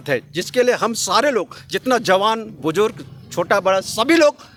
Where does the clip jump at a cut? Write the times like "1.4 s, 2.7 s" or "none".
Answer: none